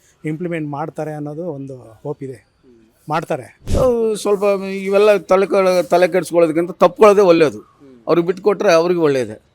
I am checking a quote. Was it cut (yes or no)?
yes